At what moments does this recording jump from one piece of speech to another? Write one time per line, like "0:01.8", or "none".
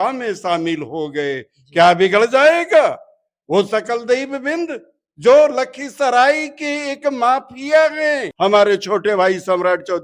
0:08.3